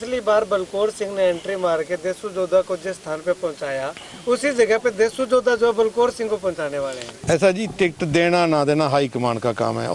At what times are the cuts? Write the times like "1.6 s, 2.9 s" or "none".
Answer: 7.1 s